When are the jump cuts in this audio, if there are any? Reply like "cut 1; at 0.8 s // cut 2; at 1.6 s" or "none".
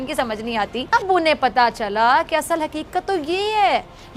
cut 1; at 0.9 s